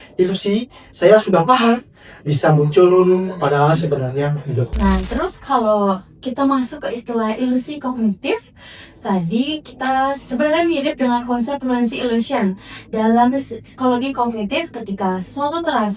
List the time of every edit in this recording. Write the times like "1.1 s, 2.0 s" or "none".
4.7 s